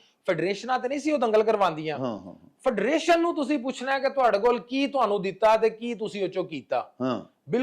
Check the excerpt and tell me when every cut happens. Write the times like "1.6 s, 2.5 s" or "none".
none